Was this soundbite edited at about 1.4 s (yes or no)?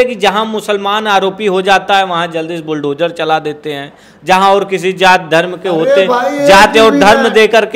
no